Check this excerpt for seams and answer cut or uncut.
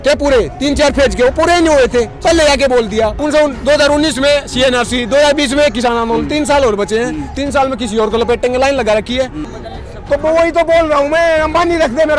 cut